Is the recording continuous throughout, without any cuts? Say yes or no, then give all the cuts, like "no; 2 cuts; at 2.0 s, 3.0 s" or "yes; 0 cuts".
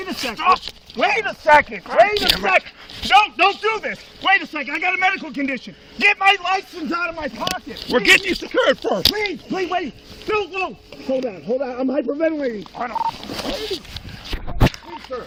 yes; 0 cuts